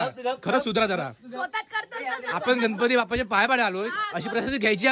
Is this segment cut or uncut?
uncut